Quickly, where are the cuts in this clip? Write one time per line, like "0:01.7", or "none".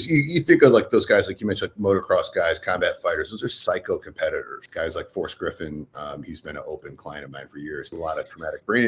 0:04.6
0:07.9